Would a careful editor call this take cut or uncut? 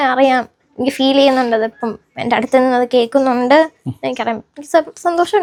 uncut